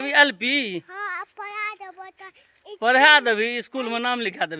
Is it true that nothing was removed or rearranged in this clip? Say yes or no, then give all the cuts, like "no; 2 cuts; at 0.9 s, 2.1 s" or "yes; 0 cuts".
yes; 0 cuts